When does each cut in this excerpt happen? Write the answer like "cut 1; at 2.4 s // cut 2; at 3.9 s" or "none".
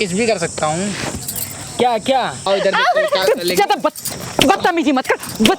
cut 1; at 2.4 s

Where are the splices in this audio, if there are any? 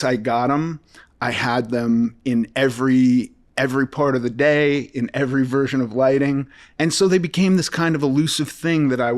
cut 1; at 6.7 s

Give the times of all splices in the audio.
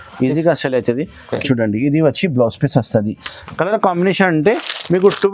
cut 1; at 1.4 s

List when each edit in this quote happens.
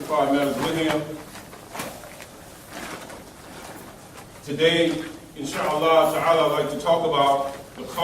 cut 1; at 4.9 s

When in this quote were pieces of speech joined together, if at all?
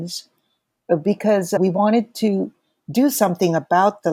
none

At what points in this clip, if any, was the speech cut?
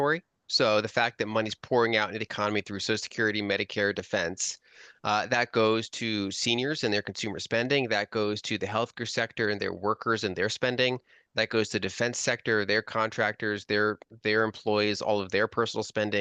none

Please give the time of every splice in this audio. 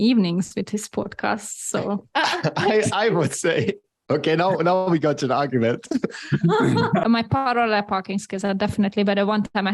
cut 1; at 2.1 s // cut 2; at 7.0 s

